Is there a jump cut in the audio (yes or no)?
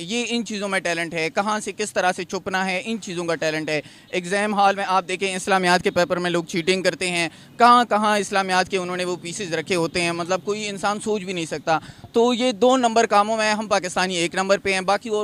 no